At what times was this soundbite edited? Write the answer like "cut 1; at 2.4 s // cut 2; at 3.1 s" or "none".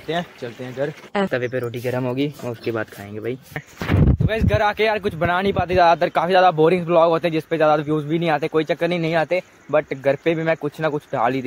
cut 1; at 1.3 s // cut 2; at 3.6 s